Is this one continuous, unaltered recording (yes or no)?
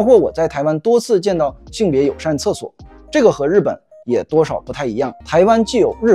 no